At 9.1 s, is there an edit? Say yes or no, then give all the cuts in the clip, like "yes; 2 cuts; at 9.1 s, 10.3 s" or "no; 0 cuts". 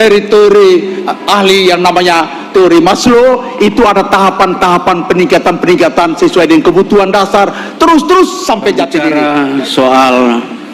yes; 1 cut; at 9.1 s